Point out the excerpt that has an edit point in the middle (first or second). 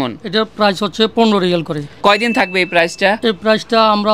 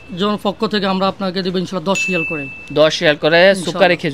first